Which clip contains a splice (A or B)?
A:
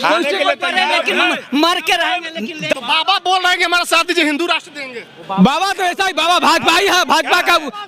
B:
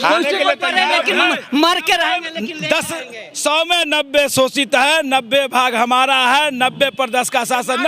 A